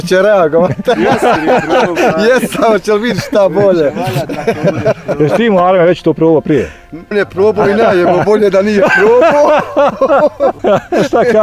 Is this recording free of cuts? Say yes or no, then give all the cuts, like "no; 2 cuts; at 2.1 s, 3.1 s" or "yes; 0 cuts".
no; 2 cuts; at 7.1 s, 10.6 s